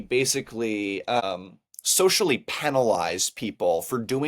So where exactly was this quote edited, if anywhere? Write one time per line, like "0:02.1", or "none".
0:01.2